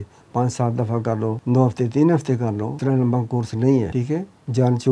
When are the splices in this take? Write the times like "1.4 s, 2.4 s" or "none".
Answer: 1.4 s, 2.7 s, 3.9 s